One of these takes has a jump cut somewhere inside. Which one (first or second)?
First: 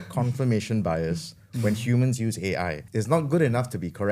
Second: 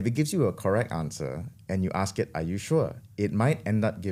first